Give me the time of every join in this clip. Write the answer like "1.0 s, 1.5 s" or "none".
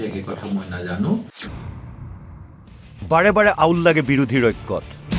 1.2 s